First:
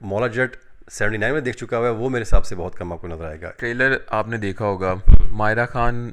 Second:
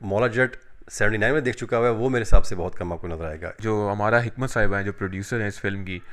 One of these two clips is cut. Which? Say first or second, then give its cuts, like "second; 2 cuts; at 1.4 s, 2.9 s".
first; 1 cut; at 3.5 s